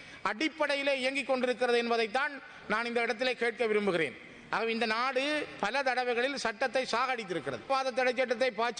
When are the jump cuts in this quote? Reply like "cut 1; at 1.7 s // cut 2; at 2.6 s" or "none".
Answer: cut 1; at 7.7 s